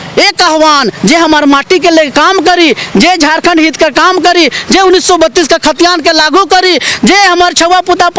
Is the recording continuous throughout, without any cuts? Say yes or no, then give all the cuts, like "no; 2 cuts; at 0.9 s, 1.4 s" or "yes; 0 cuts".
yes; 0 cuts